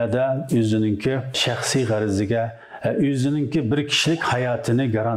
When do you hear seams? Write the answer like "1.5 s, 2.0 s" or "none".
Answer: none